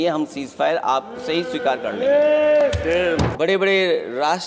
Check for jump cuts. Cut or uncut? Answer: cut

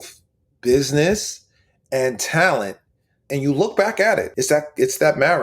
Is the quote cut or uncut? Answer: cut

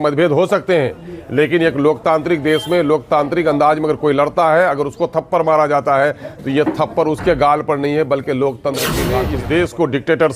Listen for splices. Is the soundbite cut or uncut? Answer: cut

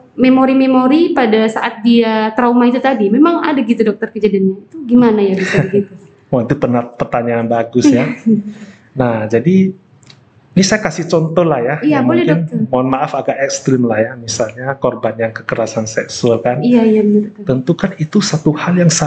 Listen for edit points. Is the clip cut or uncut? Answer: uncut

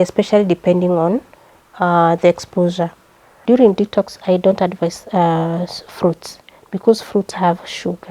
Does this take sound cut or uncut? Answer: cut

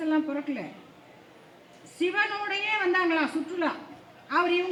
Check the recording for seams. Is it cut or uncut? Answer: uncut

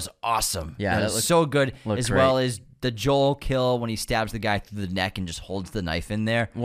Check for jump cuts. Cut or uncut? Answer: uncut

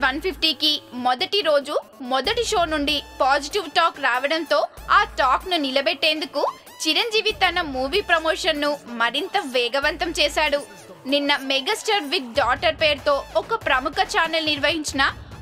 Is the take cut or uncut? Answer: cut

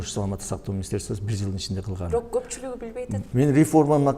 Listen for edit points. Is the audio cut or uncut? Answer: cut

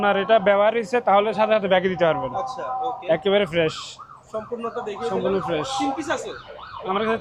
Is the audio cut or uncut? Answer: uncut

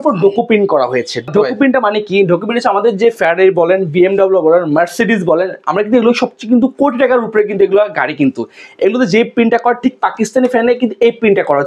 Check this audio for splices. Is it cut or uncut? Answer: cut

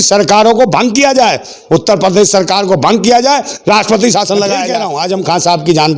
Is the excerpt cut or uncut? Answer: cut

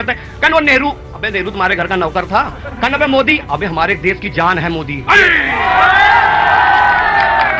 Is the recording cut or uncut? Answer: uncut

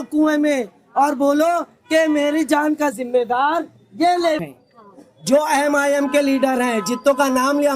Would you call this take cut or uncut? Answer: cut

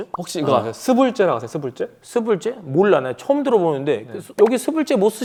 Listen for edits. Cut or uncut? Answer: uncut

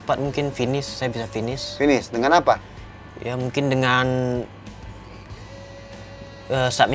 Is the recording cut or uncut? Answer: uncut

